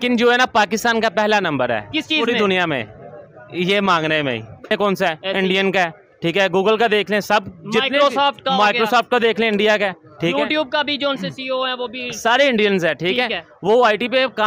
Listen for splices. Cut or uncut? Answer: cut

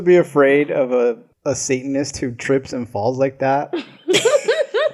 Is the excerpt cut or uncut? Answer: cut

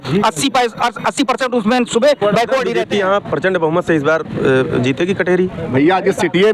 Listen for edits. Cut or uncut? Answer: cut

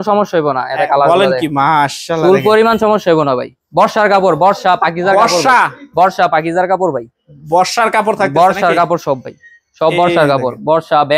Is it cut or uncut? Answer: uncut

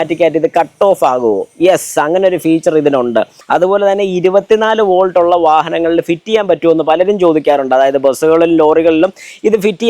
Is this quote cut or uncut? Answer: cut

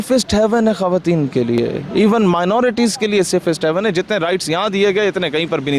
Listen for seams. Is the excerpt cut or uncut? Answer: uncut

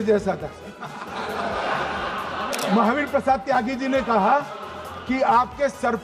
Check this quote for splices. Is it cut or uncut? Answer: cut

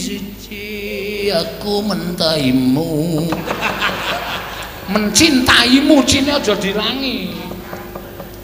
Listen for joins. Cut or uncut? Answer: uncut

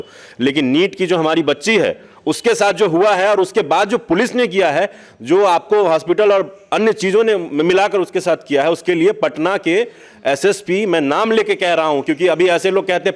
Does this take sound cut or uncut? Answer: uncut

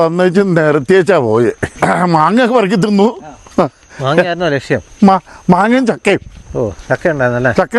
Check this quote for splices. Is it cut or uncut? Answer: cut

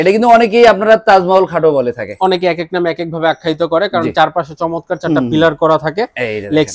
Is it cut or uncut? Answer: uncut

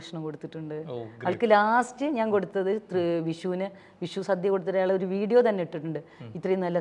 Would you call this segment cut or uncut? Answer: uncut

